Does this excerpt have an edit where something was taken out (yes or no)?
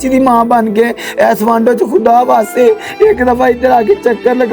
no